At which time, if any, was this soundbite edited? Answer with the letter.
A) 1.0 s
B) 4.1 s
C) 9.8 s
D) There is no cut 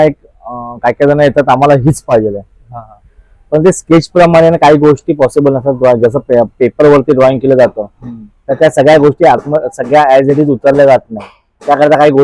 D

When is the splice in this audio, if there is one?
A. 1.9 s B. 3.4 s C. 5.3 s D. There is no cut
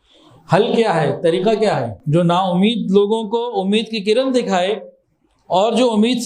A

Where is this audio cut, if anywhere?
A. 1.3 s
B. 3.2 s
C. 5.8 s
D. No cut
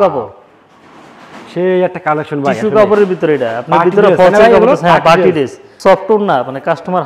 C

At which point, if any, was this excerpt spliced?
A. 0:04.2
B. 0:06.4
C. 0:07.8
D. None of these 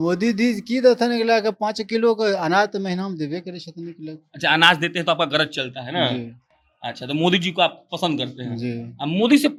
D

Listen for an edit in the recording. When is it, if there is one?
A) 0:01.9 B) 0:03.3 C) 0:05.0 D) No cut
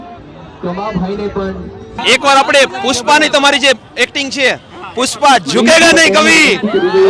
A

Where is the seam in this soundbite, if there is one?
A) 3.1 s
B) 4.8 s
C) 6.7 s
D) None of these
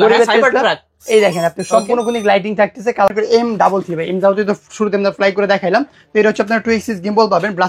A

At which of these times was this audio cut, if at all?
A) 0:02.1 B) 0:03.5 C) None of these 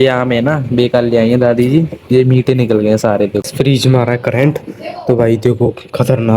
B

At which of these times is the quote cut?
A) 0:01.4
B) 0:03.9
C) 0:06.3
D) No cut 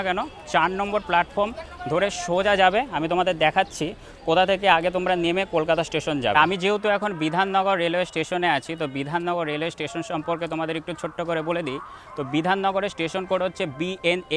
D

